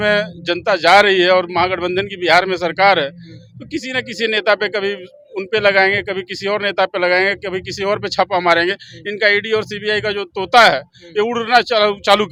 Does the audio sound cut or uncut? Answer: uncut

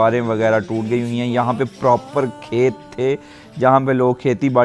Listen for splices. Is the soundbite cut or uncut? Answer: uncut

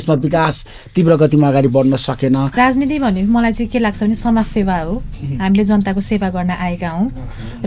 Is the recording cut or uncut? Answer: cut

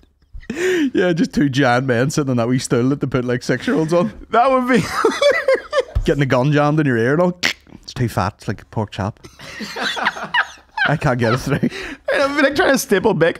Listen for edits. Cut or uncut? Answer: uncut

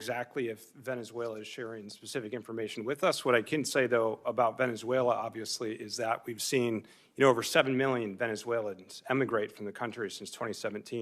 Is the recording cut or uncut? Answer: uncut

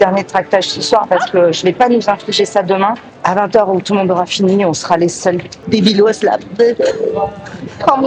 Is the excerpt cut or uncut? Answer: uncut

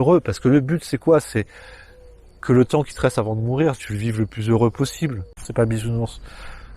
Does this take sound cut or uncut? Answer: cut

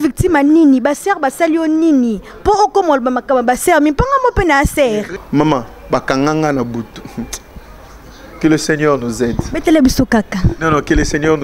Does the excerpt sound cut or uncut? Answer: cut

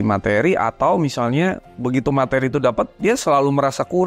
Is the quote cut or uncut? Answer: uncut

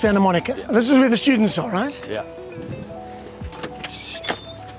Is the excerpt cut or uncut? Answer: uncut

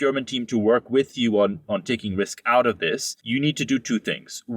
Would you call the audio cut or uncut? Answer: cut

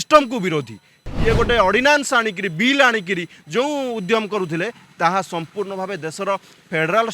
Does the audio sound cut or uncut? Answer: cut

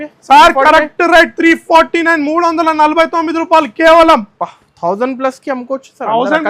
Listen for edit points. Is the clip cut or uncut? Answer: uncut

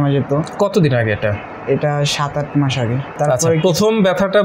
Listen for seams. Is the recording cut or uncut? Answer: cut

